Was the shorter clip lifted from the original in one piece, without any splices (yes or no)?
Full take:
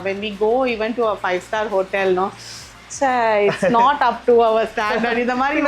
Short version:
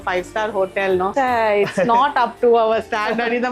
no